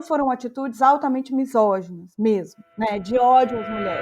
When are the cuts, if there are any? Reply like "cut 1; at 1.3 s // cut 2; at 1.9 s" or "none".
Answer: none